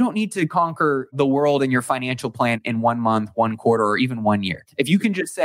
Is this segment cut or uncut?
cut